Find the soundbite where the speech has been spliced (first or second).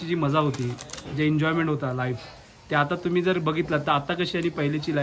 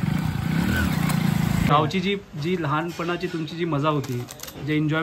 second